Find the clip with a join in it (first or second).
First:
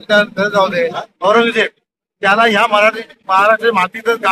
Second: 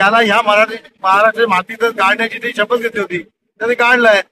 first